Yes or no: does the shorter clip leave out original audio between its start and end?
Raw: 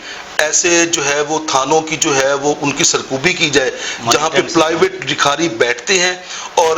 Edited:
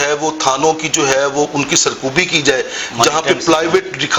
no